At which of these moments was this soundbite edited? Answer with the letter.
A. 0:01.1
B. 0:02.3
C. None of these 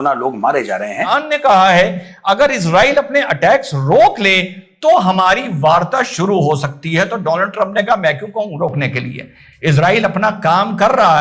A